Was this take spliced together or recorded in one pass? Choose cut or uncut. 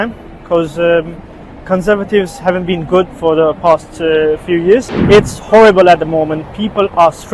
cut